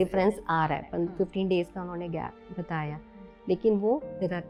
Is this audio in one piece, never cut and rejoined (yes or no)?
yes